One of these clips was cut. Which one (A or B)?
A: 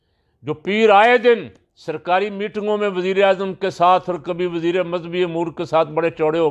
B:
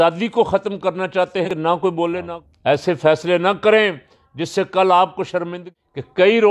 B